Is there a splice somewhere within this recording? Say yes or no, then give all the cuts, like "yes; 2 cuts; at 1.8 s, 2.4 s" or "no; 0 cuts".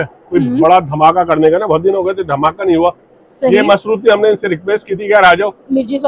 no; 0 cuts